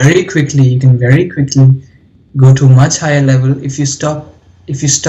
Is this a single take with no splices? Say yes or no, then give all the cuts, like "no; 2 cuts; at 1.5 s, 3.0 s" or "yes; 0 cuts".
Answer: yes; 0 cuts